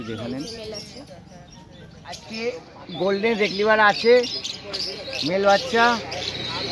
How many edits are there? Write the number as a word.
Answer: one